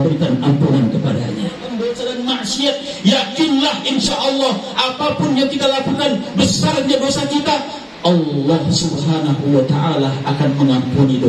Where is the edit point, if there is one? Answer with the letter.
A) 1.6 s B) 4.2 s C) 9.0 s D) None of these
A